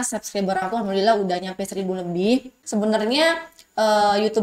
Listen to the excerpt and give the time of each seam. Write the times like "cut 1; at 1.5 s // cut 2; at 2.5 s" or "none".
cut 1; at 2.6 s